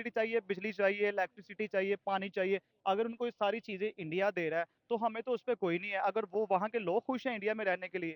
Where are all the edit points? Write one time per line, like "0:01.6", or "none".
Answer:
none